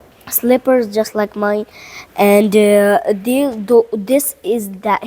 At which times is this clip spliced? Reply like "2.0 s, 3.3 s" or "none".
none

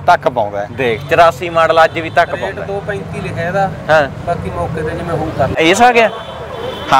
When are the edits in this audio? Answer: 5.6 s

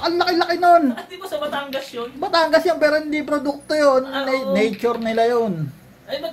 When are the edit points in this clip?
none

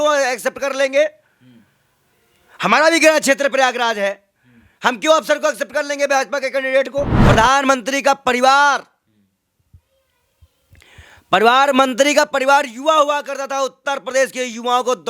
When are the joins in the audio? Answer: 7.2 s

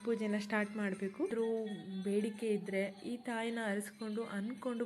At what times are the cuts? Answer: 1.3 s

